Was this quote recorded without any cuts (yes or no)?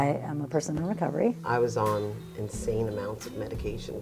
no